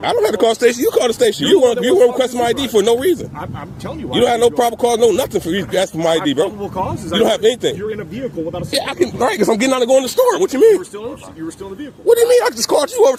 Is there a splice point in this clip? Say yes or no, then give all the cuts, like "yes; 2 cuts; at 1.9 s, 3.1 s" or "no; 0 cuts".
no; 0 cuts